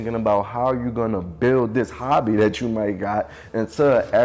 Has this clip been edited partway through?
no; 0 cuts

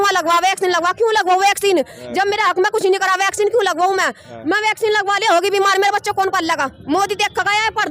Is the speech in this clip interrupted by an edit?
no; 0 cuts

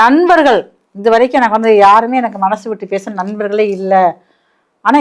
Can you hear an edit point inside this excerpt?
no; 0 cuts

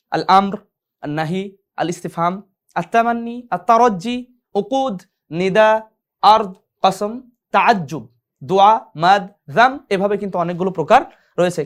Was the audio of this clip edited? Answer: no; 0 cuts

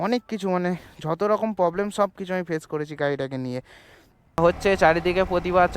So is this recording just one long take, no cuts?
no; 1 cut; at 4.4 s

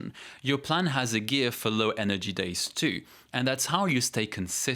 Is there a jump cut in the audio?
no; 0 cuts

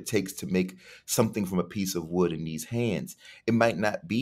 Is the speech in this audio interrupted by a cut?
no; 0 cuts

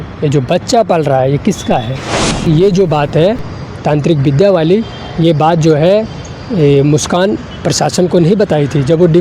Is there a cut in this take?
yes; 1 cut; at 2.5 s

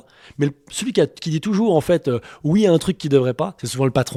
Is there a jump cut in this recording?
no; 0 cuts

